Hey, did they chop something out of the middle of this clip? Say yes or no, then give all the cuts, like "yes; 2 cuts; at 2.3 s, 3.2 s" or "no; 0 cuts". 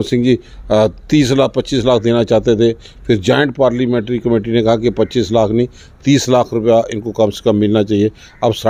no; 0 cuts